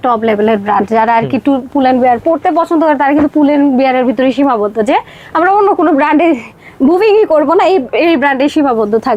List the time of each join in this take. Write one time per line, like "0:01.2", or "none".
none